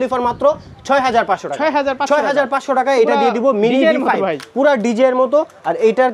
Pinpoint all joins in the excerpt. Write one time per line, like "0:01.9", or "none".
none